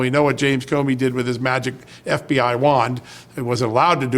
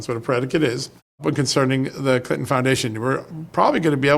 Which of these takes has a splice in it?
second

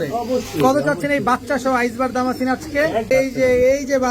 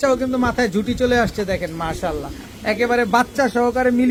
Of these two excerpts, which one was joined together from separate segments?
first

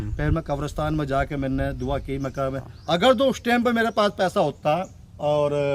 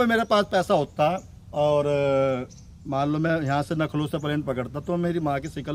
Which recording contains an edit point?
first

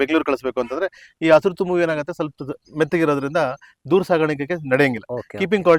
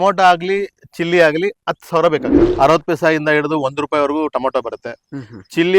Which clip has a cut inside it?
second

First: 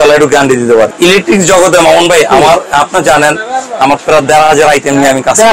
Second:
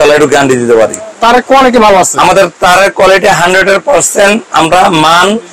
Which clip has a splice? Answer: first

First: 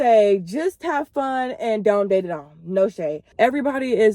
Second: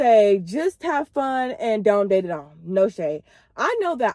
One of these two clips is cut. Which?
first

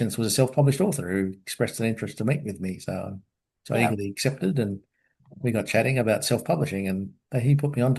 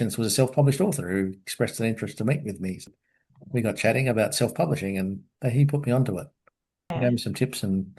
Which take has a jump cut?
second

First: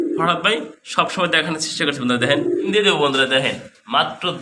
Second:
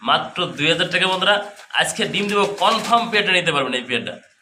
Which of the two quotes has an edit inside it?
first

